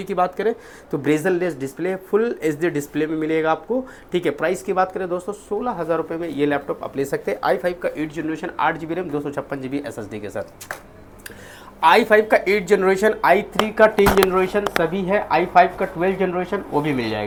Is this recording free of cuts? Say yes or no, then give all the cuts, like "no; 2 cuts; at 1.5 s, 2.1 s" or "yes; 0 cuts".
yes; 0 cuts